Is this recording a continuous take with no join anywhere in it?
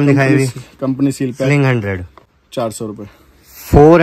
yes; 0 cuts

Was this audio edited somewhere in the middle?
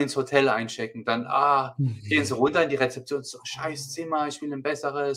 no; 0 cuts

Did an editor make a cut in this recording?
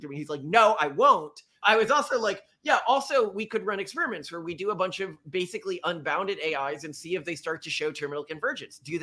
yes; 1 cut; at 1.4 s

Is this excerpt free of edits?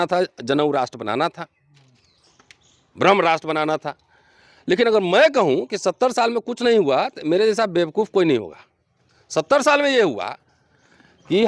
yes; 0 cuts

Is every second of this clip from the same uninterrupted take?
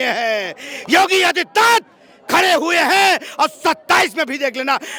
yes; 0 cuts

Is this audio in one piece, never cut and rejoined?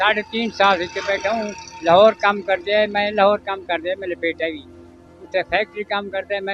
yes; 0 cuts

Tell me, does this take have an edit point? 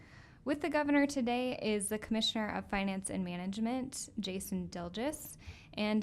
yes; 1 cut; at 2.5 s

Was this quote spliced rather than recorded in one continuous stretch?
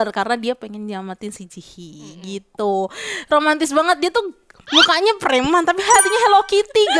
no; 0 cuts

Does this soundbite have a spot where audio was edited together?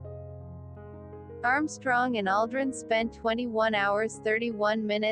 yes; 1 cut; at 1.4 s

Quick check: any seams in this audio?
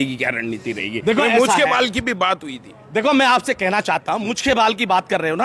no; 0 cuts

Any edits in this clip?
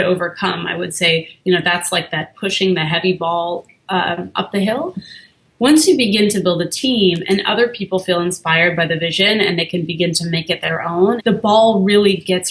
yes; 1 cut; at 11.2 s

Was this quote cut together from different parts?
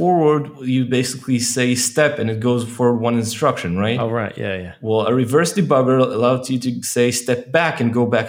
no; 0 cuts

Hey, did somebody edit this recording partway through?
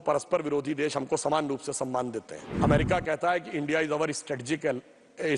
yes; 1 cut; at 2.4 s

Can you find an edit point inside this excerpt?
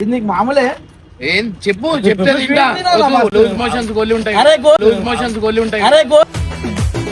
no; 0 cuts

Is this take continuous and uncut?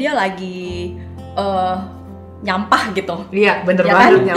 yes; 0 cuts

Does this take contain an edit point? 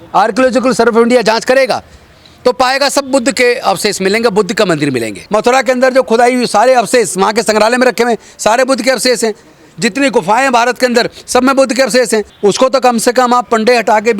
yes; 2 cuts; at 5.2 s, 12.3 s

